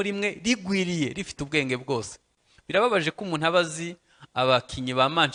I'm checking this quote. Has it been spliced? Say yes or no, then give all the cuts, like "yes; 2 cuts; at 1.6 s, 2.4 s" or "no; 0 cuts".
no; 0 cuts